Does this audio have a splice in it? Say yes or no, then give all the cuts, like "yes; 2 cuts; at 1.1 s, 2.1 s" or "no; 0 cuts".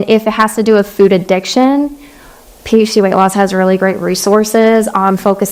no; 0 cuts